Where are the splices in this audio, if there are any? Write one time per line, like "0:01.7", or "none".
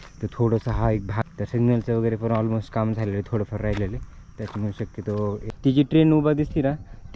0:01.2
0:05.5